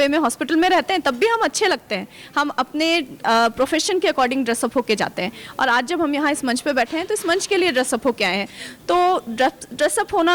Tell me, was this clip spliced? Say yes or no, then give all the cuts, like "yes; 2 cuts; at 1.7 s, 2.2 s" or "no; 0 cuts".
no; 0 cuts